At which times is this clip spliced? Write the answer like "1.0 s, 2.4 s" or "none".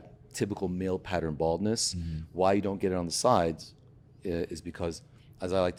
none